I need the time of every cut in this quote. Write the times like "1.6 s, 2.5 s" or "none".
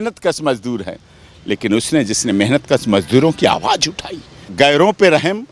4.4 s